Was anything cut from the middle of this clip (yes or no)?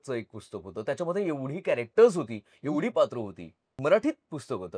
yes